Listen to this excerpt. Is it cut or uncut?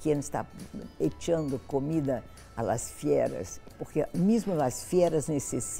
uncut